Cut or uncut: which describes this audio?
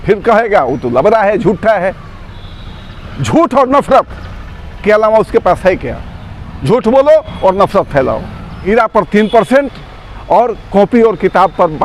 cut